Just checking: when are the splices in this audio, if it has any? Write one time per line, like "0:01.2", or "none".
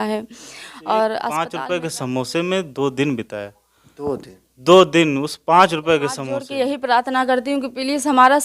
0:01.5
0:06.4